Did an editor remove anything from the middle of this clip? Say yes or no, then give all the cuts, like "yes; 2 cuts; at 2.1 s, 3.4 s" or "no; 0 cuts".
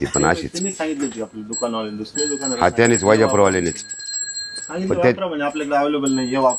yes; 2 cuts; at 2.2 s, 4.6 s